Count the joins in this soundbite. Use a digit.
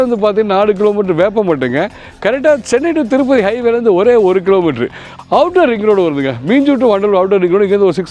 1